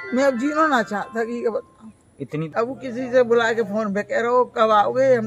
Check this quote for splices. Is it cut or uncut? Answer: cut